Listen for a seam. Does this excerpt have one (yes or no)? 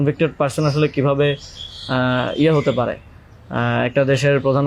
no